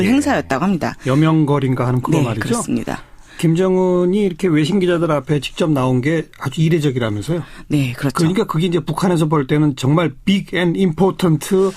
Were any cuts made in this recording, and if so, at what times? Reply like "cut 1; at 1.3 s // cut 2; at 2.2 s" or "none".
cut 1; at 4.1 s